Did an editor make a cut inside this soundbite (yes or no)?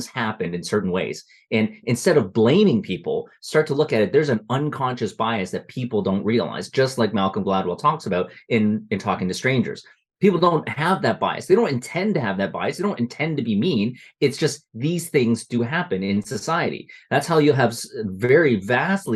no